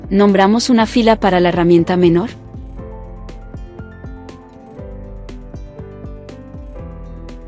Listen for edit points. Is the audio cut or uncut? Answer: cut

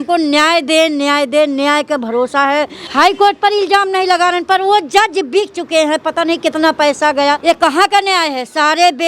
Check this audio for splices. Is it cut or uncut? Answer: cut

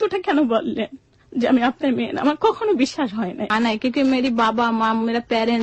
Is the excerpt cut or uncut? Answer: cut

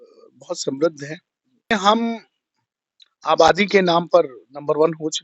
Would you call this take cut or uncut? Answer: cut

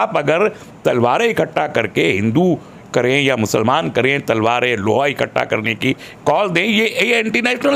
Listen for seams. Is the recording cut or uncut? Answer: uncut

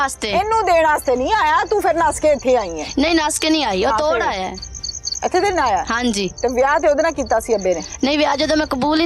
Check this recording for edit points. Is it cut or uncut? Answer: uncut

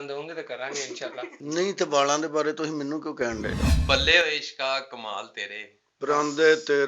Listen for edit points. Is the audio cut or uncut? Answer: cut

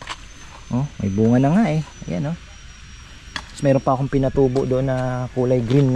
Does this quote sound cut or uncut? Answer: uncut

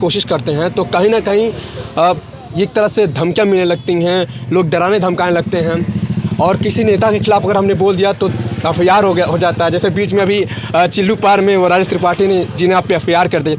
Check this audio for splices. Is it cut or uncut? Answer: uncut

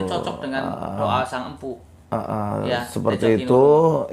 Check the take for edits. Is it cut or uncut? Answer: uncut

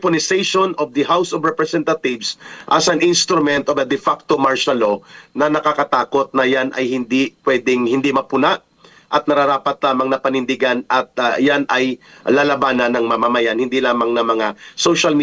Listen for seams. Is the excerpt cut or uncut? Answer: uncut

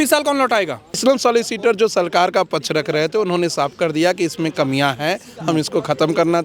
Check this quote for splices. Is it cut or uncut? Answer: cut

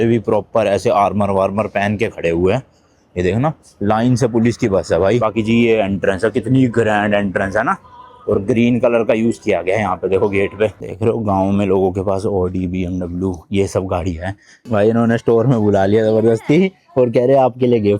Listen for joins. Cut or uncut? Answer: cut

